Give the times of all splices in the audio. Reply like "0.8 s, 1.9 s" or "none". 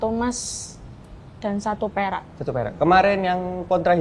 none